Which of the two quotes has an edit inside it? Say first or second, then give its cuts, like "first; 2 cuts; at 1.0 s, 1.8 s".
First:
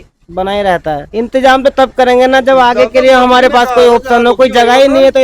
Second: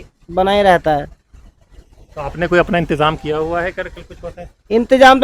first; 1 cut; at 1.1 s